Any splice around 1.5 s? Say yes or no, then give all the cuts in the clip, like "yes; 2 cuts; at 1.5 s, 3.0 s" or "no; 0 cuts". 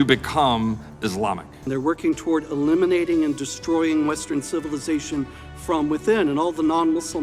yes; 1 cut; at 1.5 s